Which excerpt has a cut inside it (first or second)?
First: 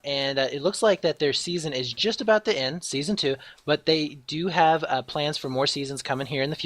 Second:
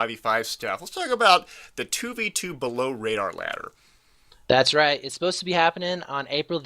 second